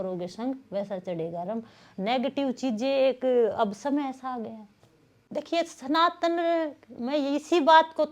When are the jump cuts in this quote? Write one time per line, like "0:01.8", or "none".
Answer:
0:05.2